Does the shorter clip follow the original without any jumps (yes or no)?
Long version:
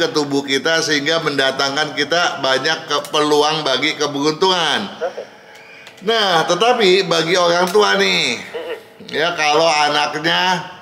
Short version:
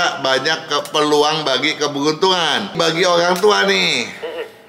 no